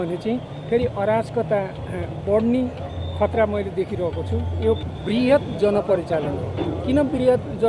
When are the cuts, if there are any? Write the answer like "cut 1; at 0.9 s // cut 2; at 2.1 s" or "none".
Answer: cut 1; at 4.8 s

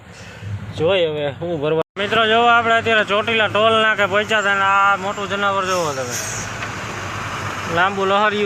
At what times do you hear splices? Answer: cut 1; at 1.9 s

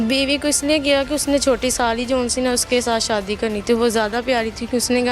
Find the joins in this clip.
none

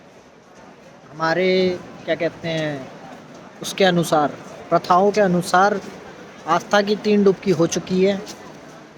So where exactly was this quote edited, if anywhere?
none

